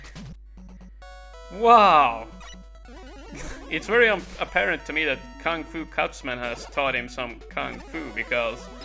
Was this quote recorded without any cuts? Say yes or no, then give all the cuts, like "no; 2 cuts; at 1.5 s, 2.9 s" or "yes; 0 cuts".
yes; 0 cuts